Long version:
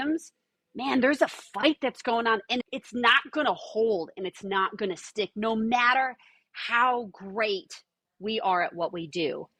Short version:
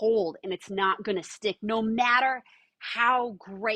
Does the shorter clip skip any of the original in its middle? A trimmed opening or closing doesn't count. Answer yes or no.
no